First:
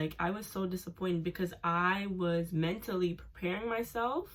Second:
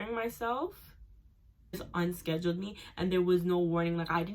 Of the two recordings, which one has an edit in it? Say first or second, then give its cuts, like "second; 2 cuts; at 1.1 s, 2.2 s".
second; 1 cut; at 1.8 s